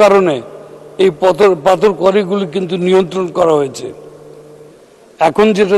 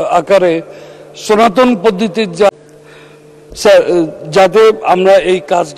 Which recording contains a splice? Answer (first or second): second